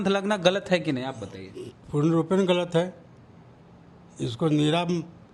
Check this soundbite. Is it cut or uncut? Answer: uncut